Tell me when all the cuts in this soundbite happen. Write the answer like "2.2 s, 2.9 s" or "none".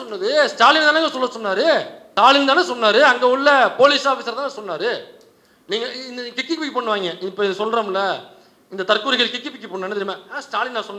2.0 s